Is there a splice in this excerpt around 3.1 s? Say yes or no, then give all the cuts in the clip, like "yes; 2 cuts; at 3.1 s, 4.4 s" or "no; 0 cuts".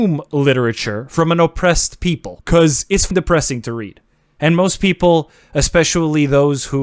yes; 1 cut; at 3.1 s